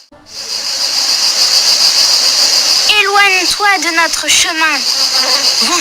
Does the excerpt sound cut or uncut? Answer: uncut